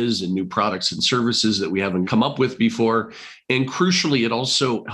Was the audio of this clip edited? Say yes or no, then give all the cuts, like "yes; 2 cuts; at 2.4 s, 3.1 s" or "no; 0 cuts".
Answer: yes; 1 cut; at 2.1 s